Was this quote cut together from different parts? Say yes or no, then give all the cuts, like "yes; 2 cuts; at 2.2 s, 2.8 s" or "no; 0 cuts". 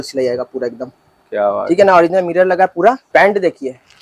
yes; 1 cut; at 3.0 s